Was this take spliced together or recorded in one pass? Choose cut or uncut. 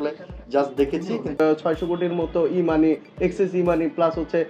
cut